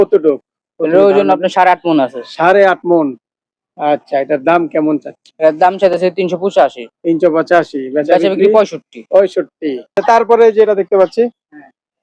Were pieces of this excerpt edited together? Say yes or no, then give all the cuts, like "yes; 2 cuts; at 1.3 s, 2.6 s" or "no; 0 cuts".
yes; 1 cut; at 9.9 s